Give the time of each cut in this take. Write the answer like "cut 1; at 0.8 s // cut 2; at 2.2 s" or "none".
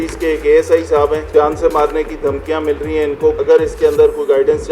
cut 1; at 1.2 s // cut 2; at 3.4 s